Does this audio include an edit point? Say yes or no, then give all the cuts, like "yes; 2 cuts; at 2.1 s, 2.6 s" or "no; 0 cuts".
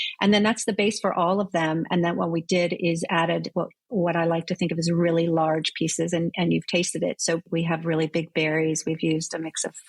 yes; 1 cut; at 7.5 s